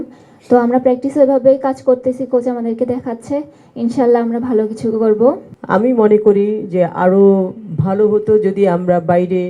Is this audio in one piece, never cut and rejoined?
no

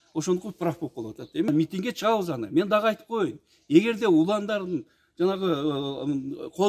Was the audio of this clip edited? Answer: yes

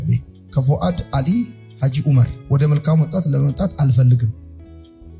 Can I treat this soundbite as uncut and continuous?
no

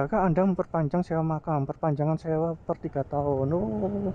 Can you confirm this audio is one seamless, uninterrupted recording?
yes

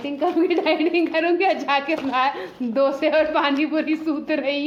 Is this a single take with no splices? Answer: yes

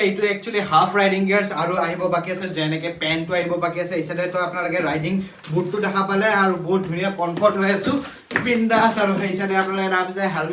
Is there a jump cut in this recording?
no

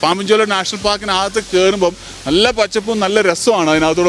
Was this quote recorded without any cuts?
yes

